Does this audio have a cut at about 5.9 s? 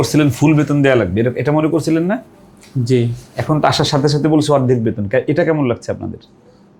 no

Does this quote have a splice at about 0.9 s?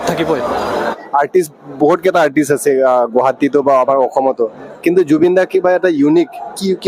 yes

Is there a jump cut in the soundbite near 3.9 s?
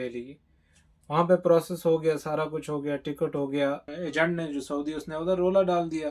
yes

